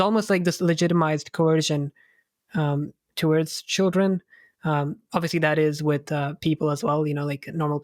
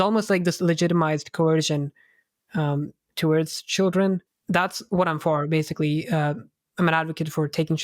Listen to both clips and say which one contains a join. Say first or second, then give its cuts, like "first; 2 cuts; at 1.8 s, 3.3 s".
second; 1 cut; at 4.3 s